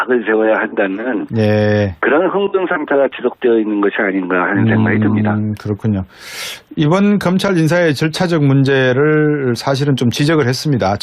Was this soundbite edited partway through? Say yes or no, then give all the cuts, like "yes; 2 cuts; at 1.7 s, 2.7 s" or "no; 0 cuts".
yes; 1 cut; at 3.7 s